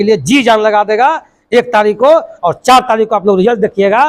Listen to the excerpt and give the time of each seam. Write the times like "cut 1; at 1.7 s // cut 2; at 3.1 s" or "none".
none